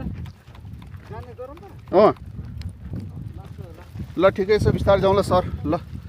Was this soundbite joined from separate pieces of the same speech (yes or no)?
no